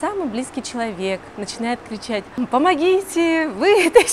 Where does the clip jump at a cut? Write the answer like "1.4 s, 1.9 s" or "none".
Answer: 2.4 s

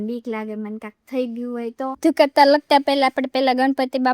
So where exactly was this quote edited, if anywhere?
2.0 s

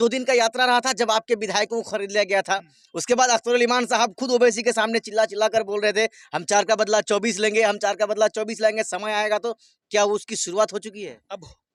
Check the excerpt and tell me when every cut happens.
none

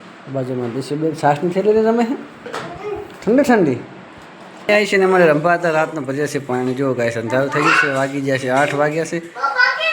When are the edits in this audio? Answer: 4.7 s

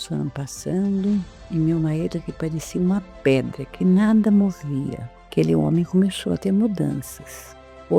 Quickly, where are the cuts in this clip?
none

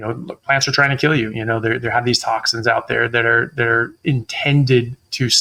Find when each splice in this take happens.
none

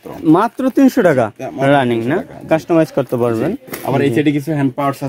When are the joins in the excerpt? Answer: none

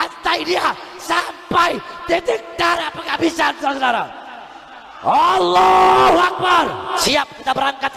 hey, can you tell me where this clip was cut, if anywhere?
7.0 s

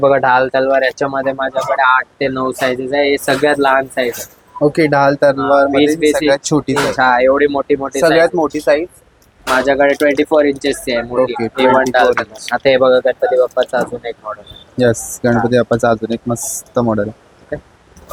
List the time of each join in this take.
none

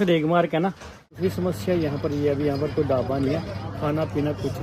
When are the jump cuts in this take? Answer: 1.2 s

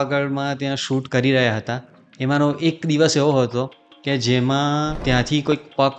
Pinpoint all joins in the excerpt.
1.1 s, 5.0 s

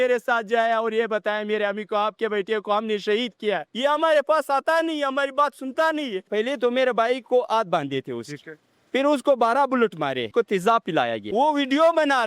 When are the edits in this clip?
3.7 s, 6.3 s, 10.3 s, 11.2 s

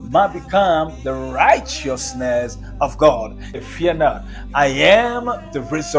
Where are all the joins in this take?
3.6 s

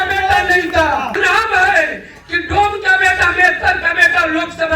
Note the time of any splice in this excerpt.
1.2 s

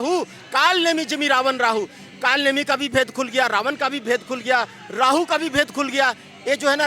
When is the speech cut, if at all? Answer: none

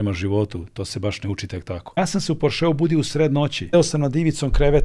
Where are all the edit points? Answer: 2.0 s, 3.7 s

